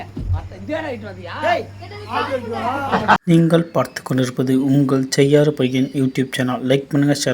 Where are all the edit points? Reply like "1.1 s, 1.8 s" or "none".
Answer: 3.2 s